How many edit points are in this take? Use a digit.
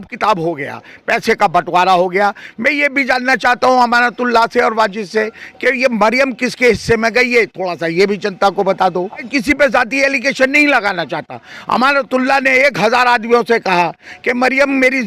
0